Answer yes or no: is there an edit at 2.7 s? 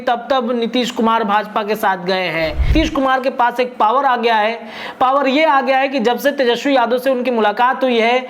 yes